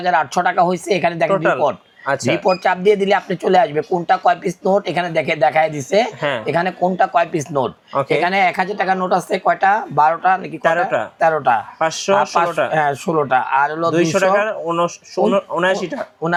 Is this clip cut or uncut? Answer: uncut